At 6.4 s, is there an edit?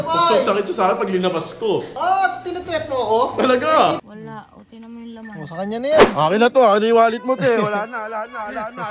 no; 1 cut; at 4.0 s

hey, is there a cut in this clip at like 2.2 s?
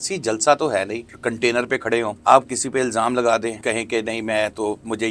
yes; 3 cuts; at 1.2 s, 2.2 s, 3.6 s

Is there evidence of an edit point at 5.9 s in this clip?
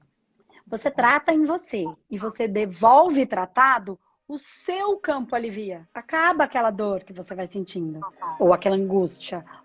yes; 1 cut; at 5.9 s

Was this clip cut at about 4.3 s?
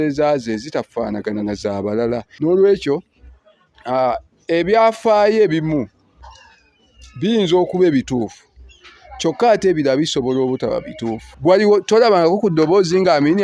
no; 2 cuts; at 2.3 s, 11.3 s

